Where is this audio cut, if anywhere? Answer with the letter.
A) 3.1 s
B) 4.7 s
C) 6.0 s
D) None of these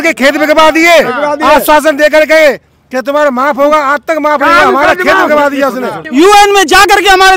C